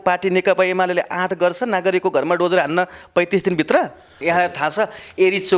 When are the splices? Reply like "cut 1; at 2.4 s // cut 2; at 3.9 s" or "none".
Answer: cut 1; at 4.1 s